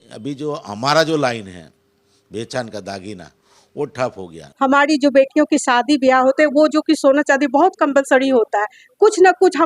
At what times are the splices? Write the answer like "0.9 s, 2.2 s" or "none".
4.5 s